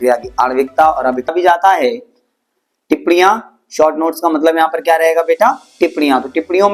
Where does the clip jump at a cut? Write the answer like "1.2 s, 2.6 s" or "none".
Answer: 1.3 s